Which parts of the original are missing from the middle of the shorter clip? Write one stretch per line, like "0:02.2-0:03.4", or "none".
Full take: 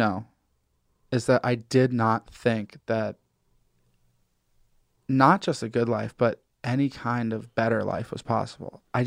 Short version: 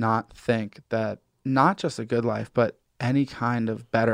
0:03.3-0:04.9